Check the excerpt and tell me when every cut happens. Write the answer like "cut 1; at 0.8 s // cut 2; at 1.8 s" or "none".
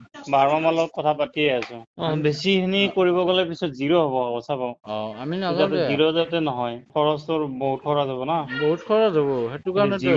cut 1; at 1.8 s // cut 2; at 6.8 s